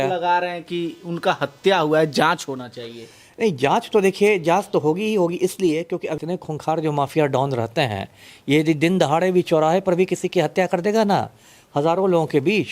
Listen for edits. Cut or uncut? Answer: cut